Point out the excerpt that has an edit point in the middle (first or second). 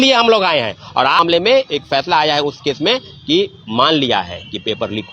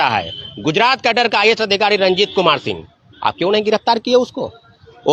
first